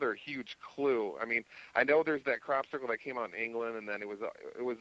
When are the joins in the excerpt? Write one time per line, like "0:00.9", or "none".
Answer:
0:02.0

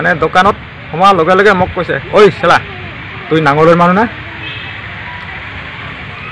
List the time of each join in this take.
none

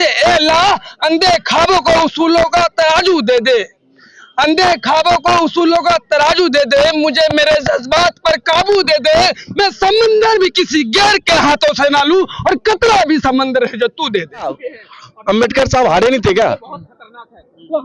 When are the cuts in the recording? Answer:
0:14.5

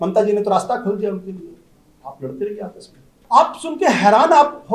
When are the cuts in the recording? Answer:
0:03.2

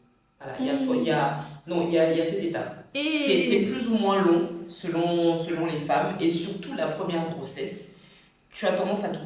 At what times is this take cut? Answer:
none

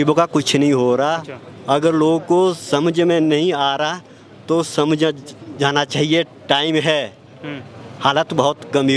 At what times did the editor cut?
none

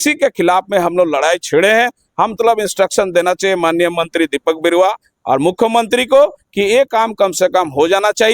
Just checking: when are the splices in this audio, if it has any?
0:02.4

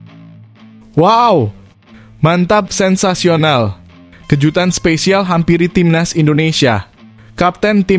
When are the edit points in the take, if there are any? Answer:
0:00.9

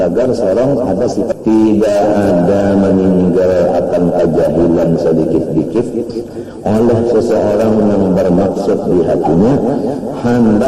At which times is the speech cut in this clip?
0:01.3

